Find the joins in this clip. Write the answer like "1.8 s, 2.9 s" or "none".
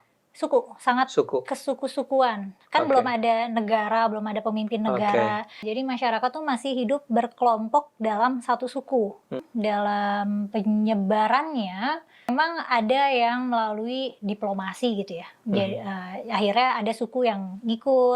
5.6 s, 9.4 s, 12.3 s